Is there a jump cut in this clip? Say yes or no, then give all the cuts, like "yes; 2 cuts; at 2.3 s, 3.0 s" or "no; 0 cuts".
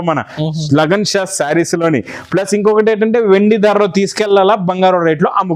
no; 0 cuts